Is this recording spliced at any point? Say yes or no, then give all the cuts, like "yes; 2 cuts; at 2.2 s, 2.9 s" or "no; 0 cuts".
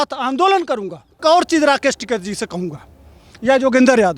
yes; 1 cut; at 1.2 s